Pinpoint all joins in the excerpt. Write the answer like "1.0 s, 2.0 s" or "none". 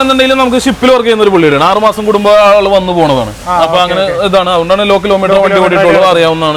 none